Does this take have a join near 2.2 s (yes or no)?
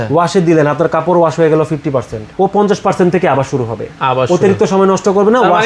yes